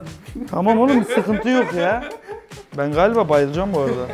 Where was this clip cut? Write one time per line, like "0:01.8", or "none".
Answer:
0:02.6